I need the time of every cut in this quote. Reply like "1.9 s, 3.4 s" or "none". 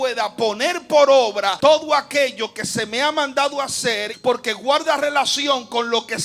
1.5 s, 4.1 s